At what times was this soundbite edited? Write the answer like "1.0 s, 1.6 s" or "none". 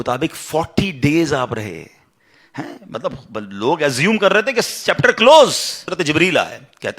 5.9 s